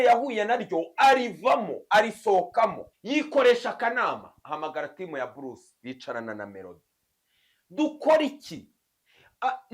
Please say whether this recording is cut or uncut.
cut